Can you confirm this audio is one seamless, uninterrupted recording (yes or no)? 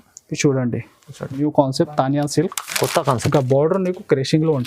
no